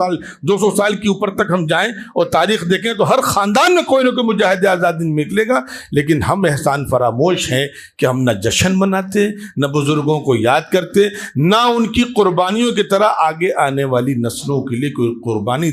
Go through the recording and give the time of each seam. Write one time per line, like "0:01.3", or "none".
none